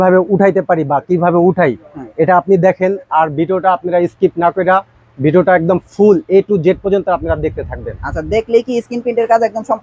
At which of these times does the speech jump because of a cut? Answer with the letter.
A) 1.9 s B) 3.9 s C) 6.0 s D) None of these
D